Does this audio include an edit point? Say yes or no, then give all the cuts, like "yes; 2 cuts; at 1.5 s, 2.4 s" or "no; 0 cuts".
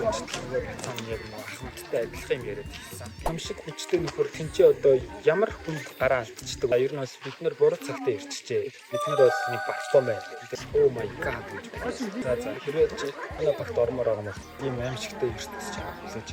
yes; 4 cuts; at 3.3 s, 6.7 s, 10.4 s, 14.4 s